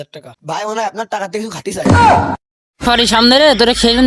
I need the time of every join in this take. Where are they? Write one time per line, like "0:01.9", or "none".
0:02.8